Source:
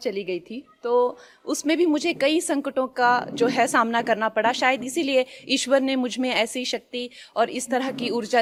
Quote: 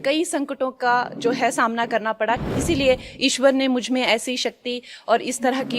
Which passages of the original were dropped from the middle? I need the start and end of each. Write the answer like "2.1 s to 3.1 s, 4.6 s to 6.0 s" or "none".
4.6 s to 4.8 s

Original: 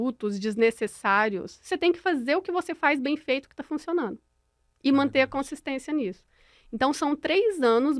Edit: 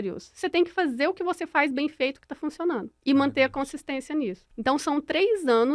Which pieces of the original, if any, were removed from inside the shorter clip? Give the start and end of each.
4.2 s to 4.7 s, 6.2 s to 6.6 s

